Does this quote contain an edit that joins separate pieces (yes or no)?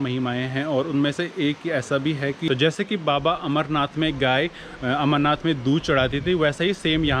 no